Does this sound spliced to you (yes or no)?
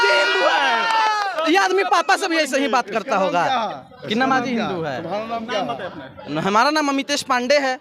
no